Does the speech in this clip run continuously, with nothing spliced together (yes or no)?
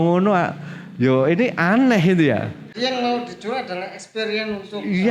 no